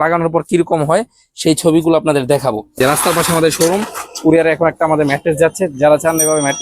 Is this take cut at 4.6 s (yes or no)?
no